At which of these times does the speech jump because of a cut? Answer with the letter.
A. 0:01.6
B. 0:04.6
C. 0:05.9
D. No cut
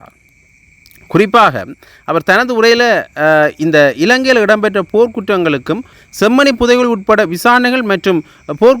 C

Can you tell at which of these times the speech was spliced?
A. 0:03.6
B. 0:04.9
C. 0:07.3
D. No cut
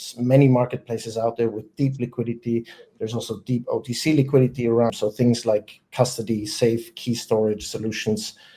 B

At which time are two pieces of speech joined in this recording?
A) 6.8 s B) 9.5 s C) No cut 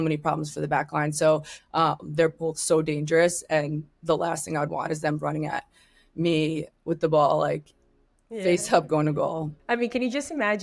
B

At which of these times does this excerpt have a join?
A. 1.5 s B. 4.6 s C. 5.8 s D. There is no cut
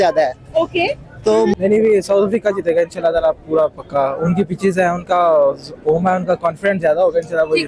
A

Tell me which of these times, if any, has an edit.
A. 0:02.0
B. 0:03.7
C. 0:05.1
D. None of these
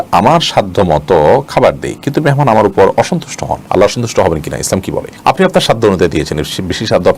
D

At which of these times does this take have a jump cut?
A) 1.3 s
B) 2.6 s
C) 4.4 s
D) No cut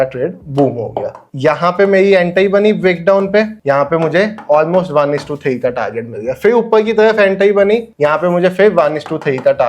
A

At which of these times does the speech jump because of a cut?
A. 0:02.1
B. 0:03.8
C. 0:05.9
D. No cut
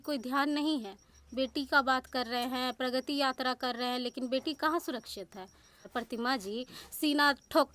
C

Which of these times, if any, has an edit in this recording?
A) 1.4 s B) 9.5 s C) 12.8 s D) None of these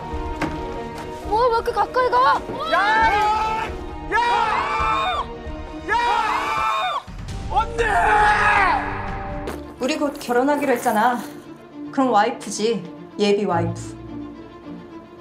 B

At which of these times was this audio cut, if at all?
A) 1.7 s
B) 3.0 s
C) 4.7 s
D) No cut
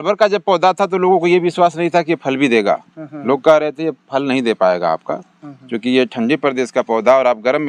D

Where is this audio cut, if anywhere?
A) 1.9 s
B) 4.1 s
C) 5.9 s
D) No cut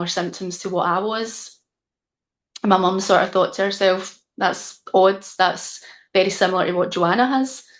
D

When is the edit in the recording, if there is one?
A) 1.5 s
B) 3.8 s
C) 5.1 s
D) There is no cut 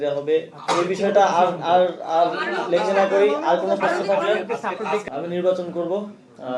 C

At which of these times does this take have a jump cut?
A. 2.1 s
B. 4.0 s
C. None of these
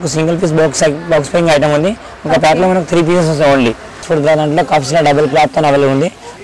B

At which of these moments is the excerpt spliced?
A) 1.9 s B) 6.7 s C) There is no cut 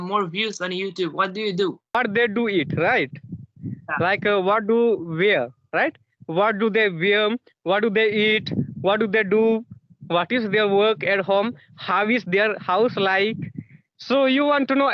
A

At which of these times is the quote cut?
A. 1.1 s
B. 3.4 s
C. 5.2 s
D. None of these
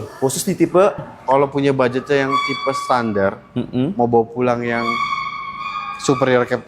A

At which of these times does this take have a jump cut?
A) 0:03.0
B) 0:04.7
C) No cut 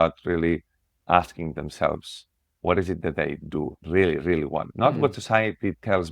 B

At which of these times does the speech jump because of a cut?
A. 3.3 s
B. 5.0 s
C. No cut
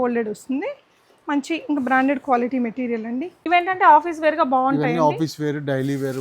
A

